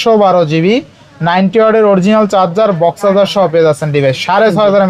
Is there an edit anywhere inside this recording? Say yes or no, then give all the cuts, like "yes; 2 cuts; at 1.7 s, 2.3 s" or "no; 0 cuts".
no; 0 cuts